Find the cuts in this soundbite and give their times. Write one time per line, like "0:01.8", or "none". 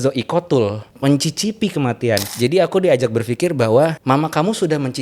0:00.9
0:02.3
0:04.0